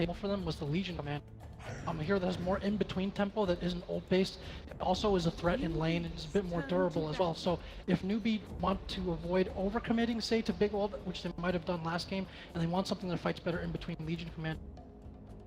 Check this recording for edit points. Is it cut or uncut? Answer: cut